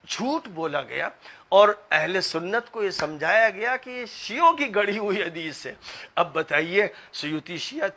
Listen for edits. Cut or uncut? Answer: uncut